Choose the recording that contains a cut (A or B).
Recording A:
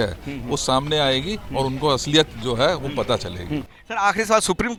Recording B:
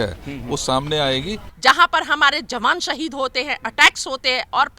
B